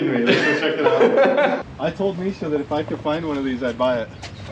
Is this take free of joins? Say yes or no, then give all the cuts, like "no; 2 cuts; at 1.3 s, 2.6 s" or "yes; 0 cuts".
no; 1 cut; at 1.6 s